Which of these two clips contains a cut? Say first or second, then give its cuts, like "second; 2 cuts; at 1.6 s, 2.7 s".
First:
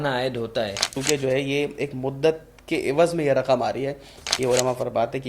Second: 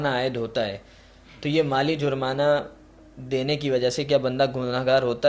first; 2 cuts; at 1.0 s, 4.2 s